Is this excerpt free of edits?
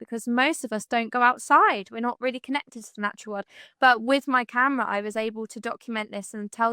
no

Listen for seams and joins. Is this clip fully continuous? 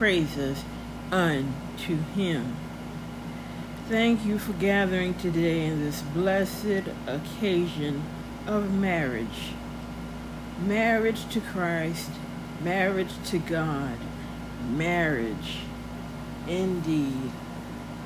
yes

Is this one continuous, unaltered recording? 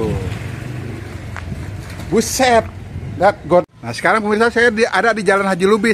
no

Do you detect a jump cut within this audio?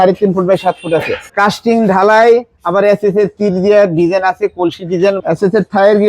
yes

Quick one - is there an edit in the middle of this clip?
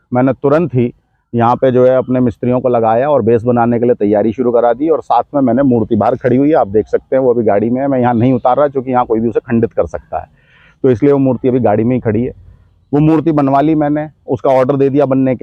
no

